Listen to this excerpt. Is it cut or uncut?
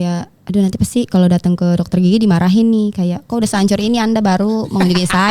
uncut